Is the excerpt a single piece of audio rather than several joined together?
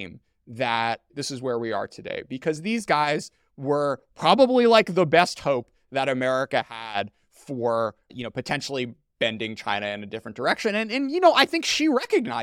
no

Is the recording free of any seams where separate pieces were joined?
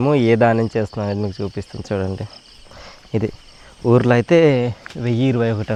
yes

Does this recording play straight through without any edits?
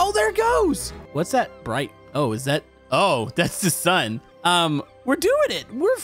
no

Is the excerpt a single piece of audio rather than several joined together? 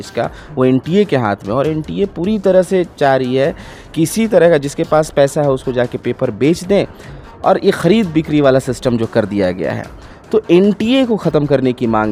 yes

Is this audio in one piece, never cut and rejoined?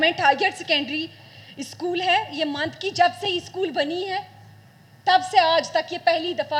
yes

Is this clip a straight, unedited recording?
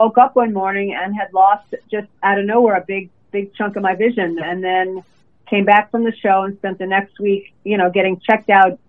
yes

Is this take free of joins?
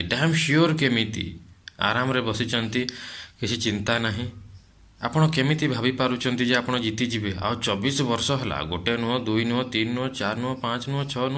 yes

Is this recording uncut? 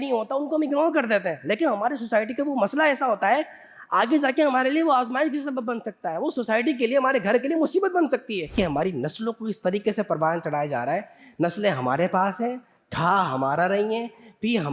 no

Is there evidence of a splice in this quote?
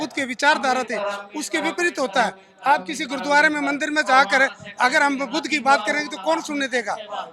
no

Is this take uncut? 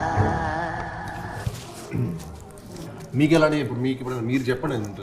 yes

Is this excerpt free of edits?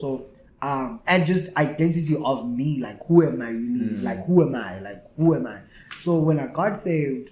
yes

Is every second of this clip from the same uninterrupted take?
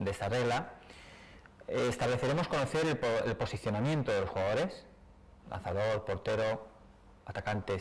yes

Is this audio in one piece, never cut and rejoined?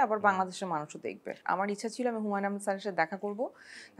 no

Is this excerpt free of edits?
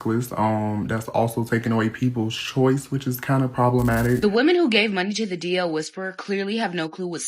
no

